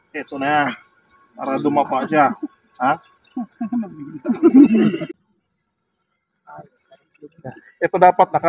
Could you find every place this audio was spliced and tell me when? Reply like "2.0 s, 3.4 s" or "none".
5.2 s